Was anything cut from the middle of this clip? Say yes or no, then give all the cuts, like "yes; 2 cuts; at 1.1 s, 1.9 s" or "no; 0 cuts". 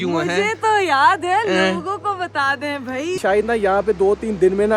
yes; 1 cut; at 3.2 s